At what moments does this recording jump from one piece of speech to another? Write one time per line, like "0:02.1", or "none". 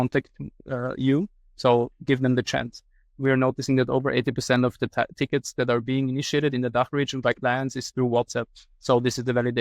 0:03.2